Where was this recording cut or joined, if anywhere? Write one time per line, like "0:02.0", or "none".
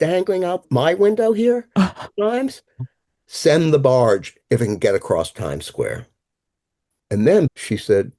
0:03.2
0:07.5